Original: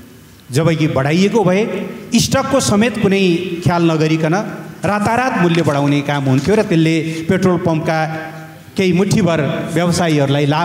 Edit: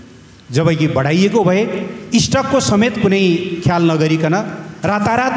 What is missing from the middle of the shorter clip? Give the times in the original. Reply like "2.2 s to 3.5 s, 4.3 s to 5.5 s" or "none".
none

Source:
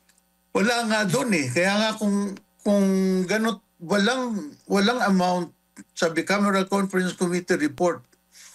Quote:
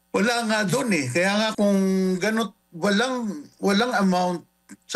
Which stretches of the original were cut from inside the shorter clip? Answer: 1.9 s to 2.6 s

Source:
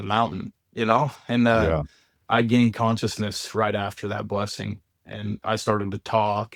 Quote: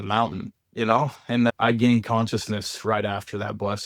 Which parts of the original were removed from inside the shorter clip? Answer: 1.5 s to 2.2 s

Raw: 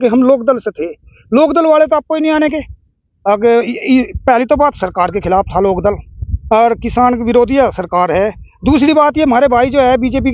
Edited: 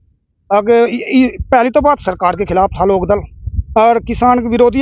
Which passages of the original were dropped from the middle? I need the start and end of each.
none

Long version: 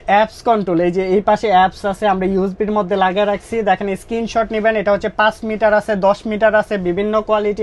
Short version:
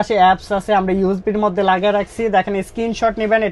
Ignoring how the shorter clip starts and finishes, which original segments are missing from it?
none

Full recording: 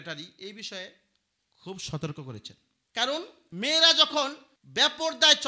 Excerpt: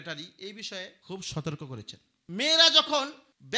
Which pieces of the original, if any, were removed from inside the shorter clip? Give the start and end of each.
1.0 s to 1.5 s, 2.7 s to 3.4 s

